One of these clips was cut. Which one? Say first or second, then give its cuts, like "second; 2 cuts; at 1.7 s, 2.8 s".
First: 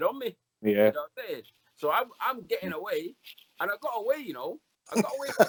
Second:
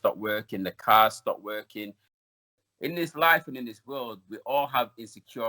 second; 1 cut; at 2.4 s